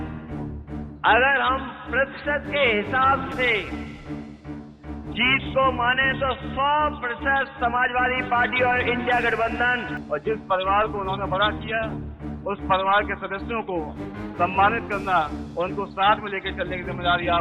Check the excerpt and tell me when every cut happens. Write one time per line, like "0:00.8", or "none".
0:09.9